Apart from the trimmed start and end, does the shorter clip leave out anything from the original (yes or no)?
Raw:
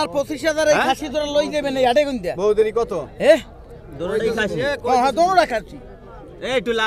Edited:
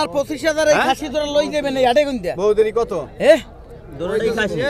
no